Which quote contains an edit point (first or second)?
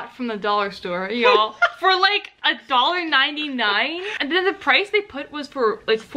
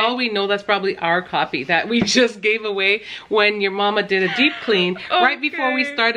first